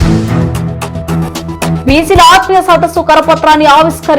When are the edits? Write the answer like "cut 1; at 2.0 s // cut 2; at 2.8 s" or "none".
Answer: cut 1; at 1.6 s